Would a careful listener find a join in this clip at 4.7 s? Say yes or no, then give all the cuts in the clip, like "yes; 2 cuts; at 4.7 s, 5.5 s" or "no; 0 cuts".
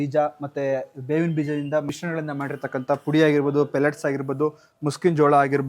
no; 1 cut; at 1.9 s